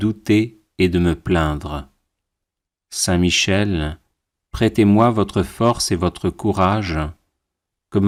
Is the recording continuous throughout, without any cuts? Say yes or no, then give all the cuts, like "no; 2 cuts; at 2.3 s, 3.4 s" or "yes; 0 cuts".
yes; 0 cuts